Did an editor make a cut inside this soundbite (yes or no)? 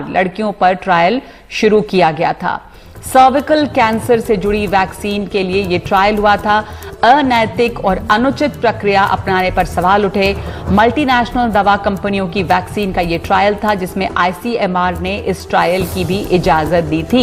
no